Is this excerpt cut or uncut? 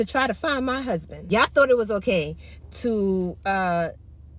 cut